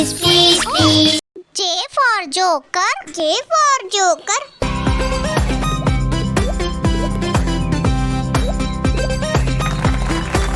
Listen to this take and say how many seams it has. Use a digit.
0